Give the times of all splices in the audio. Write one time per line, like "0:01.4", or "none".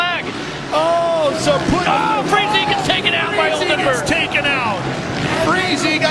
none